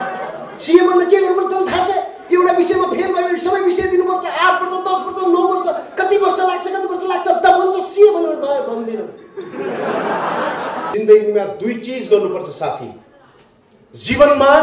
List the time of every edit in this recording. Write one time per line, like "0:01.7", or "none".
0:10.8

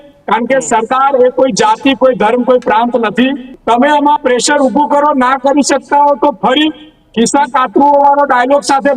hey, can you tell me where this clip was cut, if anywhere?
0:03.5

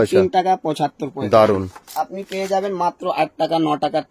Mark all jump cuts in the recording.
0:01.8

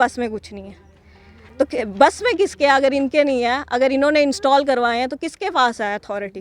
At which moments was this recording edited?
none

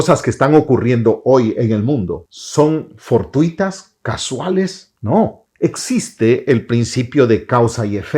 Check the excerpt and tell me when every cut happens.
0:04.9
0:05.4

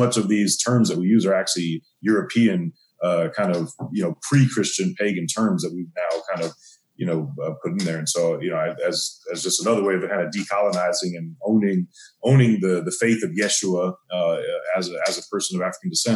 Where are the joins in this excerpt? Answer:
none

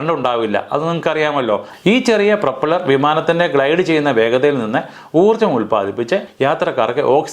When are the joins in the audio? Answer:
0:01.7
0:06.3

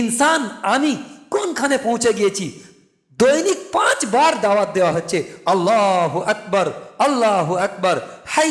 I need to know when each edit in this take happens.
none

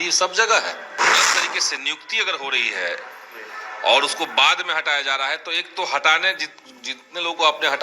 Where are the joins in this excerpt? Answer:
0:01.2

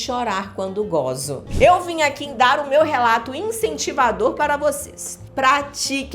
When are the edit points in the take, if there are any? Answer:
0:01.5
0:05.2

